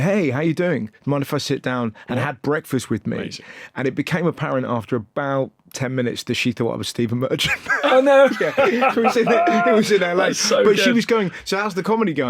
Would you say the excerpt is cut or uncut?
uncut